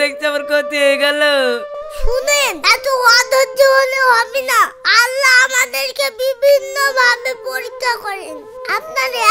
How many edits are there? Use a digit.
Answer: 1